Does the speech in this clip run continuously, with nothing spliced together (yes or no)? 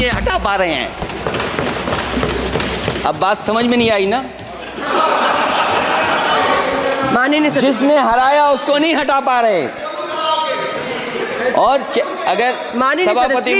yes